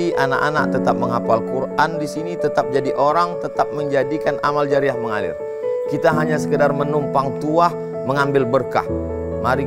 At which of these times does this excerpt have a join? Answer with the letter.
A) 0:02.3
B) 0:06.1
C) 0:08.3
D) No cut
D